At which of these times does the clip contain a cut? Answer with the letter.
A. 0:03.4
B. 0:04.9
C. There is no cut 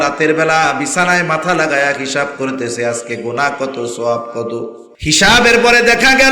B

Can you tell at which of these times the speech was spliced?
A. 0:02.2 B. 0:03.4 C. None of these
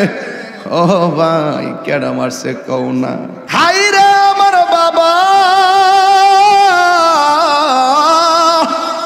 B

